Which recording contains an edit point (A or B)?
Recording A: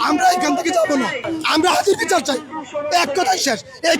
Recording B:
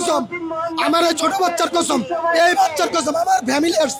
A